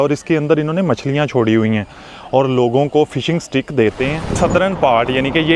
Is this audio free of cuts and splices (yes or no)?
no